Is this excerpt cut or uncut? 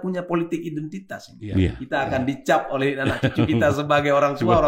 cut